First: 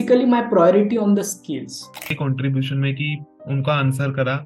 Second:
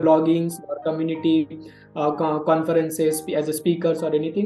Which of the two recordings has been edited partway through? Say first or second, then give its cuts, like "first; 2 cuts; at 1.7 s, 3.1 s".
first; 1 cut; at 2.1 s